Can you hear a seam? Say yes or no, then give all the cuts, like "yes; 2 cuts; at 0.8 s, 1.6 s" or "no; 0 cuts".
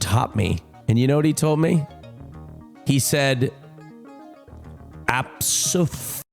no; 0 cuts